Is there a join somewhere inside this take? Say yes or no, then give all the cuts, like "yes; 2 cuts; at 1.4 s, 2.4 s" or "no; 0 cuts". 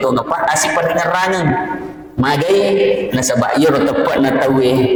no; 0 cuts